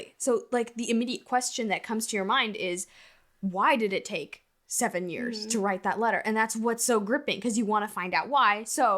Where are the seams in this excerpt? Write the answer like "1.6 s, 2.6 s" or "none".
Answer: none